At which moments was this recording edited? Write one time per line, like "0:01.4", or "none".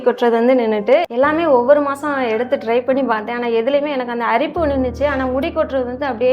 0:01.0